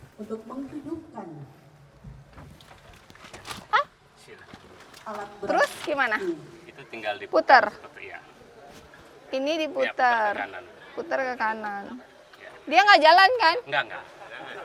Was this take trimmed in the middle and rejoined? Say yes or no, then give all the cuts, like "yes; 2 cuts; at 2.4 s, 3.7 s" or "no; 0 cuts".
no; 0 cuts